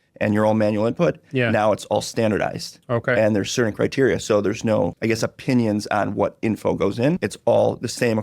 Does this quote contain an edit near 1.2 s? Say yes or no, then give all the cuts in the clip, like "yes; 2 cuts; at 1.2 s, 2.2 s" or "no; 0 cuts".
no; 2 cuts; at 5.0 s, 7.3 s